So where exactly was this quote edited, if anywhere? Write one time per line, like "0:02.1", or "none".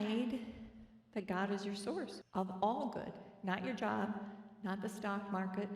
0:02.2